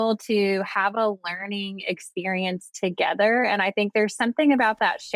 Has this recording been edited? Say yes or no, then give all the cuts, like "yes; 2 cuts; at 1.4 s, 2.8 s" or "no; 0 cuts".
no; 0 cuts